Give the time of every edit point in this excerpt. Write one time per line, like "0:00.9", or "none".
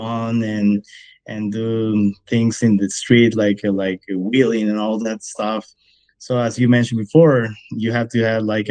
0:05.8